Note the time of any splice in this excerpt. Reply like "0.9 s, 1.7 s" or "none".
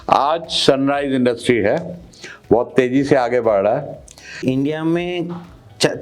4.4 s